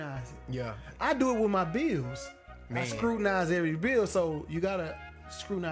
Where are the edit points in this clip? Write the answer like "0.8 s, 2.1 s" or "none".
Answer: none